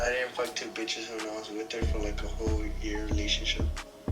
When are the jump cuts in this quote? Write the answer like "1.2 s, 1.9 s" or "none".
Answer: none